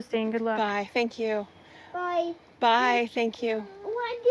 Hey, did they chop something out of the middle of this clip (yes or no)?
no